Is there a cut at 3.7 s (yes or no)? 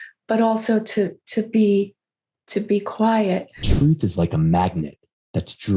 yes